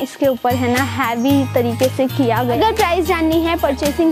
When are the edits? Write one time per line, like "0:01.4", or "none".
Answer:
0:02.6